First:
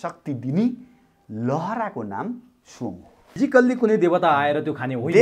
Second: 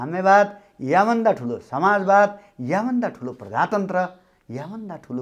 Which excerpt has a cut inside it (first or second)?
first